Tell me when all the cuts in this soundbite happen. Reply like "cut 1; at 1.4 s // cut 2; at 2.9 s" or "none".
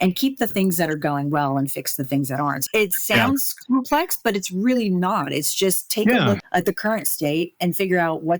cut 1; at 2.6 s // cut 2; at 6.4 s